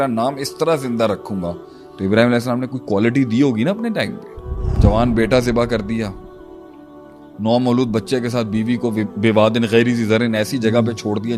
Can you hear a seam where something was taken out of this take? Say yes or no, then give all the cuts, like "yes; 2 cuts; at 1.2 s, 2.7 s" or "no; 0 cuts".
yes; 1 cut; at 4.7 s